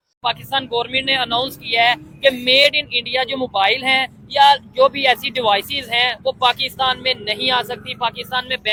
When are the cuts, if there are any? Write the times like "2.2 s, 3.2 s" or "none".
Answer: none